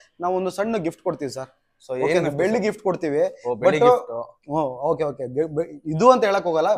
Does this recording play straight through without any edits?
yes; 0 cuts

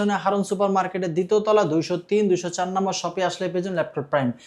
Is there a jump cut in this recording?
no; 0 cuts

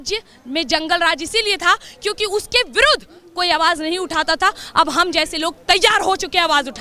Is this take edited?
no; 0 cuts

